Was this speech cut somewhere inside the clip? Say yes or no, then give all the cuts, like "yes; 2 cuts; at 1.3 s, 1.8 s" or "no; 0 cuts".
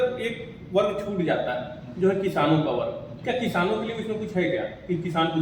no; 0 cuts